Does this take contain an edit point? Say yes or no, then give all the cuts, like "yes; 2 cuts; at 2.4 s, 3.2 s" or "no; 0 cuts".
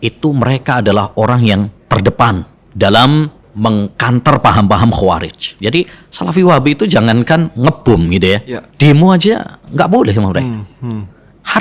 yes; 5 cuts; at 1.8 s, 2.6 s, 3.4 s, 5.5 s, 8.6 s